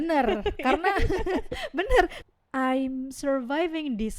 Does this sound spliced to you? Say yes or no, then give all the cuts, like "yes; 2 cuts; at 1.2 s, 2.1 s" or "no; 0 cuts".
yes; 1 cut; at 2.2 s